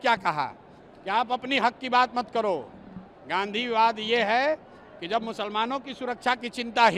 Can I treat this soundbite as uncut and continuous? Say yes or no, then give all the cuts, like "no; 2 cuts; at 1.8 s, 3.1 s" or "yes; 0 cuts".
yes; 0 cuts